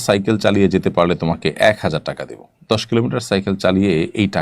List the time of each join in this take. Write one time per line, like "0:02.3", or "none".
none